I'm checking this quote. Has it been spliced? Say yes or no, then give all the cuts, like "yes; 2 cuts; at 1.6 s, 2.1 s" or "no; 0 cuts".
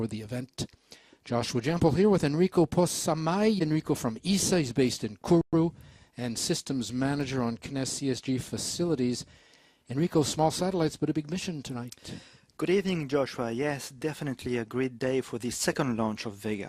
no; 0 cuts